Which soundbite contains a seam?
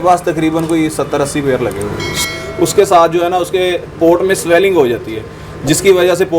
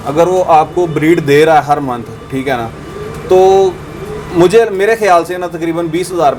first; 1 cut; at 2.1 s

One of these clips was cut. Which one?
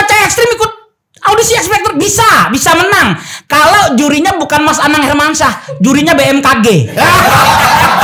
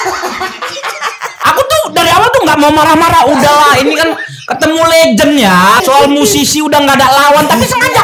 second; 2 cuts; at 1.3 s, 5.8 s

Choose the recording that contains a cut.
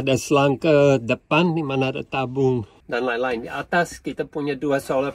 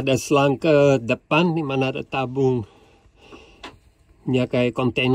first; 1 cut; at 2.8 s

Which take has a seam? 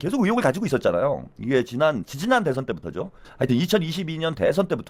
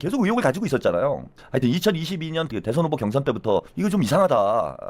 second; 3 cuts; at 1.3 s, 2.5 s, 3.7 s

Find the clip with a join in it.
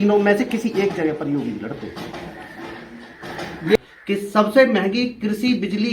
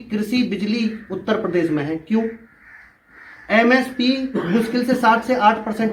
first; 1 cut; at 3.8 s

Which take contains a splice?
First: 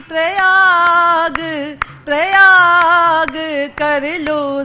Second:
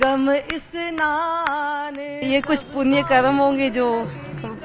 second; 1 cut; at 2.1 s

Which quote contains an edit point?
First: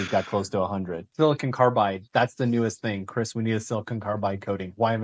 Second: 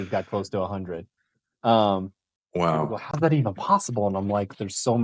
first; 1 cut; at 1.0 s

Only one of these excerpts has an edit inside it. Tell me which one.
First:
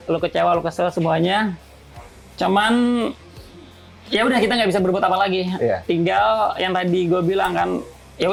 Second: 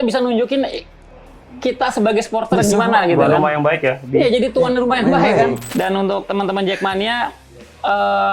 second; 1 cut; at 5.6 s

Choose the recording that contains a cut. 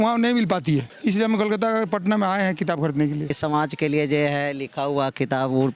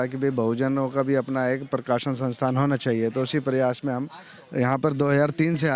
first; 2 cuts; at 0.9 s, 3.4 s

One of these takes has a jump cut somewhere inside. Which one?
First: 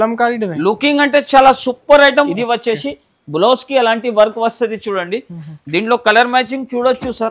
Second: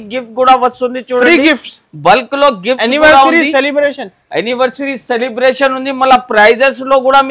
first; 1 cut; at 2.3 s

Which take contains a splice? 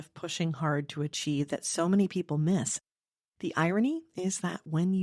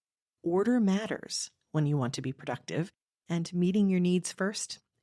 first; 1 cut; at 2.8 s

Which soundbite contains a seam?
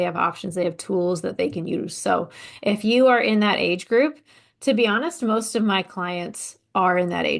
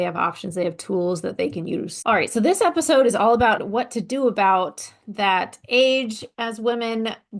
second; 3 cuts; at 1.9 s, 3.6 s, 6.3 s

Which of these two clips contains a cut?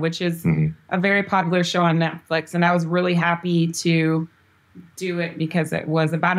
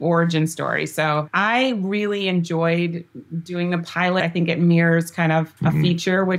second; 3 cuts; at 1.3 s, 4.2 s, 5.6 s

